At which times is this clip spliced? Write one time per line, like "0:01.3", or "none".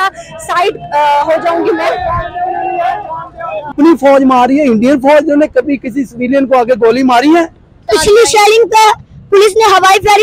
0:03.7
0:07.9